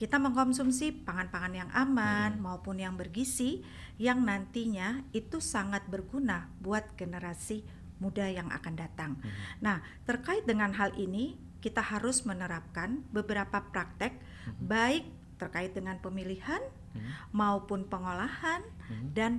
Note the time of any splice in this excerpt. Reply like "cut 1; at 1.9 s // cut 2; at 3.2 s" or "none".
none